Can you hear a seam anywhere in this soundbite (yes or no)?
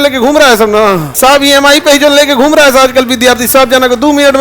yes